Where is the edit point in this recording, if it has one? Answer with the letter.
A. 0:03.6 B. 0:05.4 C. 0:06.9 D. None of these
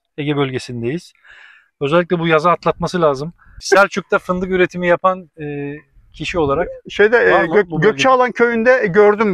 A